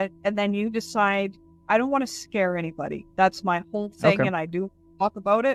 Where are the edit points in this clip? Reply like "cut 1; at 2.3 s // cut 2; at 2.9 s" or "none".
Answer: none